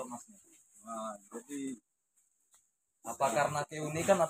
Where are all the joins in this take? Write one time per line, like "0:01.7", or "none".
none